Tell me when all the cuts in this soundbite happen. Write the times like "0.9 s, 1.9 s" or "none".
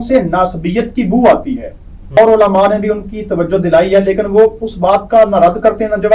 2.2 s